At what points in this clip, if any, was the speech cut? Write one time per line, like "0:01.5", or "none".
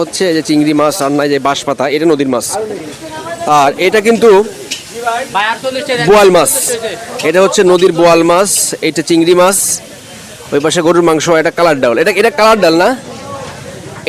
none